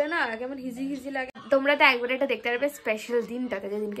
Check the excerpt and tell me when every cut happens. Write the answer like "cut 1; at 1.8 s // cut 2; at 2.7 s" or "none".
cut 1; at 1.4 s